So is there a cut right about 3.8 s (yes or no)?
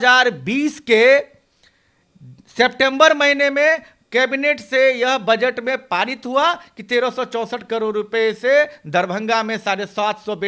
no